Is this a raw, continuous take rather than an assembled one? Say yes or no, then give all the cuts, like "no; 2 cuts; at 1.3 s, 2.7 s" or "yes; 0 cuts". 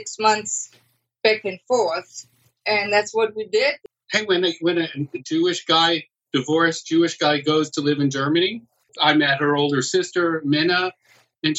no; 2 cuts; at 3.8 s, 8.9 s